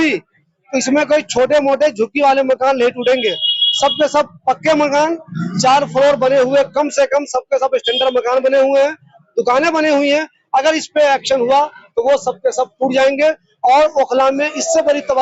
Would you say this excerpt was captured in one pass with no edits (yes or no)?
yes